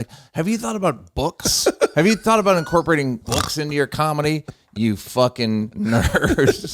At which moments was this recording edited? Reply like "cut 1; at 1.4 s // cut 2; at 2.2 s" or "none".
cut 1; at 3.2 s // cut 2; at 5.7 s